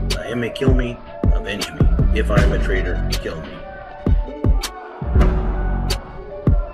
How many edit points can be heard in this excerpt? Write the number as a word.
one